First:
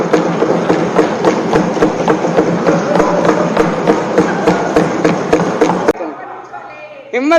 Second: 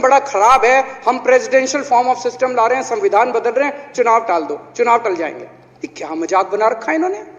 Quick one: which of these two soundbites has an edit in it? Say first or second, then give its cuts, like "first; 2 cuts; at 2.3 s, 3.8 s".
first; 1 cut; at 5.9 s